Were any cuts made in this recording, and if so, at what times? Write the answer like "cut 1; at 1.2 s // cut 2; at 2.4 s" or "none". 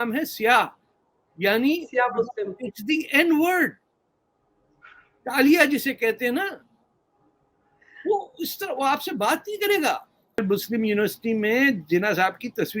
cut 1; at 10.4 s